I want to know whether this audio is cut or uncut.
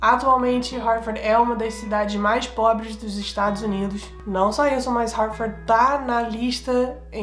cut